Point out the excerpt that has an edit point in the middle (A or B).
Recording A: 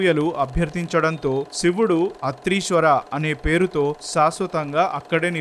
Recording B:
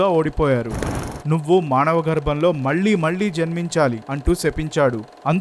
B